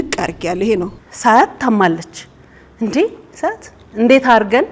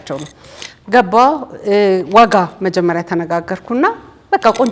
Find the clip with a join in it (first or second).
first